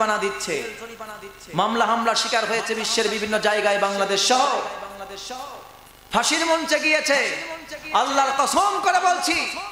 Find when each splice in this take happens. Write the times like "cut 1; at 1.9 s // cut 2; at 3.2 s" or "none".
none